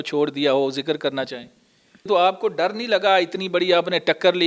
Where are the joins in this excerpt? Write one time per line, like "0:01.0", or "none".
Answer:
0:02.1